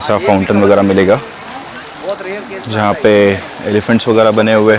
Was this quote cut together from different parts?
no; 0 cuts

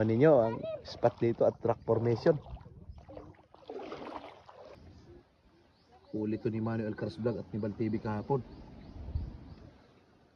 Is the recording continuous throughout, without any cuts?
no; 1 cut; at 4.7 s

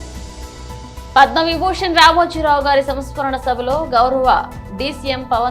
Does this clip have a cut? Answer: yes; 1 cut; at 1.1 s

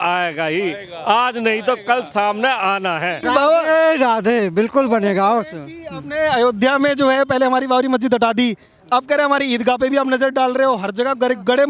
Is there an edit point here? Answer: yes; 1 cut; at 3.2 s

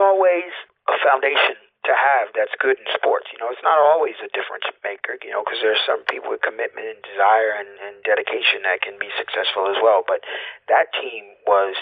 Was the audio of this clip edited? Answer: no; 0 cuts

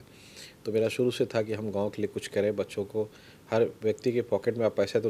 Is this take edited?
no; 0 cuts

